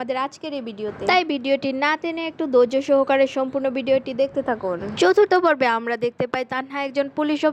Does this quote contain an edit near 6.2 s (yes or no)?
no